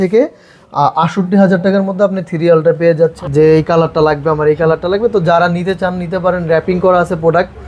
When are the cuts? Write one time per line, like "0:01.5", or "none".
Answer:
0:03.2